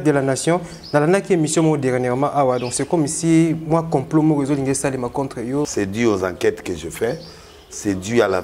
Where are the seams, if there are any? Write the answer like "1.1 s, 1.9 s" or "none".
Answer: 5.7 s